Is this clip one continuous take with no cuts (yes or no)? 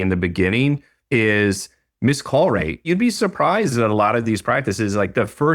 no